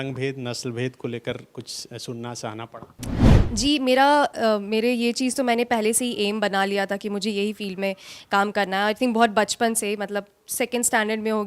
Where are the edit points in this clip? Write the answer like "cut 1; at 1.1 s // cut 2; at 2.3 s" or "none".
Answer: cut 1; at 3.3 s